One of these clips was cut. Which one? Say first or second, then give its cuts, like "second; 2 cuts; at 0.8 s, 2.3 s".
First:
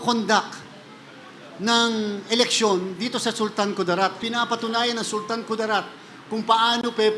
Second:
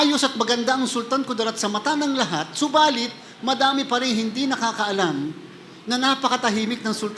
first; 1 cut; at 4.2 s